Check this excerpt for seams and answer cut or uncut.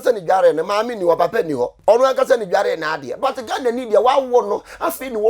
cut